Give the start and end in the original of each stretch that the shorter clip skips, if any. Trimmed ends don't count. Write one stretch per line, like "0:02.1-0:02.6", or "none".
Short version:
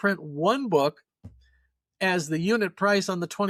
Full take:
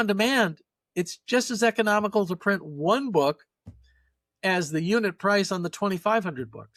none